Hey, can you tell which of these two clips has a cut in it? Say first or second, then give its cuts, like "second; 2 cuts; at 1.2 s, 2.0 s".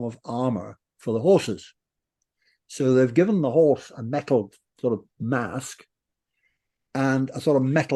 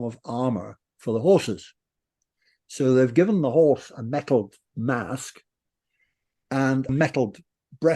second; 2 cuts; at 4.7 s, 6.9 s